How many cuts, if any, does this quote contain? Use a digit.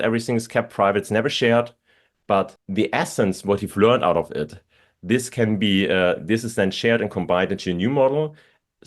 1